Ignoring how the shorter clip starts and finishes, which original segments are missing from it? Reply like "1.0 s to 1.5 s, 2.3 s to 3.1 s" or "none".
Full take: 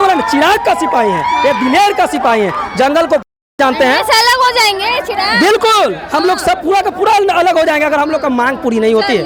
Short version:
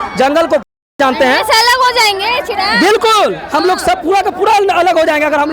none